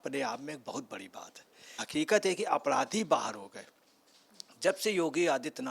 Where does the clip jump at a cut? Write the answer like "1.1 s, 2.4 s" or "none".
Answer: 1.8 s